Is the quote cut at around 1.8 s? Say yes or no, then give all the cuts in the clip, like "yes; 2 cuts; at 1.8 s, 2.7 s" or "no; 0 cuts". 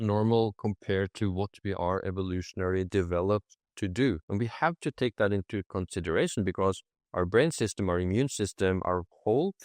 no; 1 cut; at 4.2 s